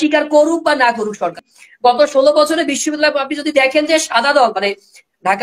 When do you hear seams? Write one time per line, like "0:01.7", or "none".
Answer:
0:01.4